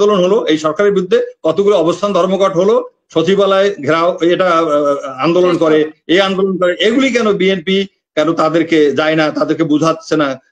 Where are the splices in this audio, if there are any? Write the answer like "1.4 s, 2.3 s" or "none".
none